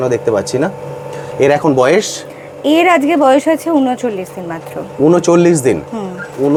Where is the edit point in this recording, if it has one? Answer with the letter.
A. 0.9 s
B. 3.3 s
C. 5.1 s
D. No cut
D